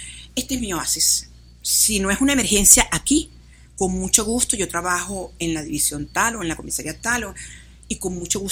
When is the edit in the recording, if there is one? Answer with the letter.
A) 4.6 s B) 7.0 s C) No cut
C